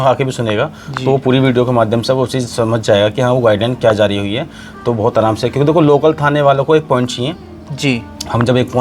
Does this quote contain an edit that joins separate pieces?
no; 0 cuts

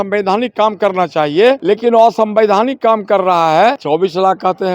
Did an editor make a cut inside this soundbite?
yes; 2 cuts; at 1.6 s, 3.8 s

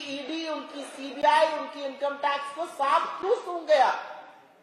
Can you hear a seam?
no; 0 cuts

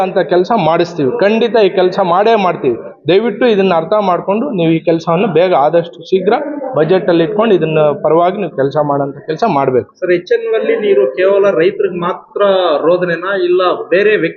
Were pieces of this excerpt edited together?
no; 0 cuts

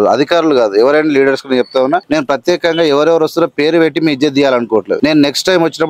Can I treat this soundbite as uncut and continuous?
no; 2 cuts; at 2.0 s, 5.0 s

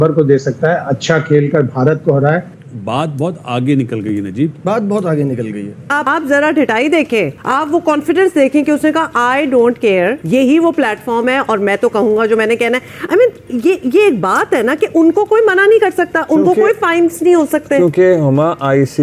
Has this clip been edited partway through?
yes; 4 cuts; at 2.6 s, 5.9 s, 7.4 s, 10.2 s

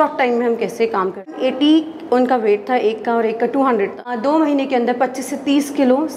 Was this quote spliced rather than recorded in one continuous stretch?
yes; 2 cuts; at 1.4 s, 4.1 s

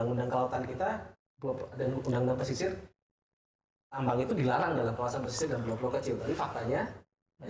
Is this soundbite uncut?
yes; 0 cuts

